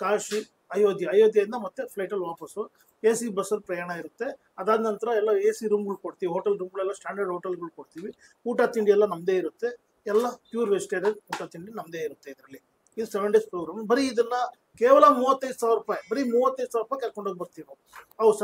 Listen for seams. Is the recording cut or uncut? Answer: uncut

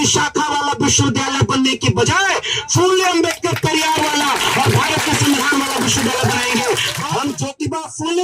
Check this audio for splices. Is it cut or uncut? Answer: cut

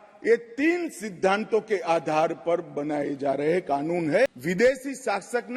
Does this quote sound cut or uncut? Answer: cut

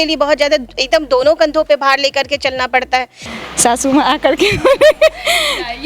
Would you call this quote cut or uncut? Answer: cut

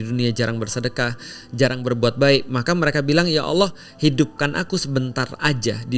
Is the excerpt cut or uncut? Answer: uncut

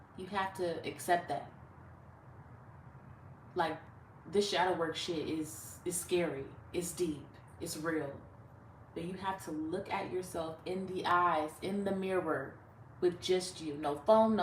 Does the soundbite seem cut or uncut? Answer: uncut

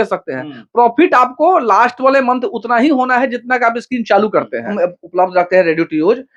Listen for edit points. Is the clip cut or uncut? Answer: cut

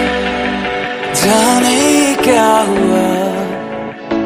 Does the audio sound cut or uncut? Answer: uncut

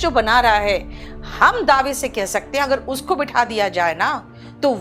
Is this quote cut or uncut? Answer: uncut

